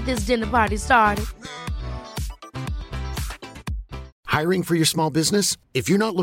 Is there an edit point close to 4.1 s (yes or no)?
yes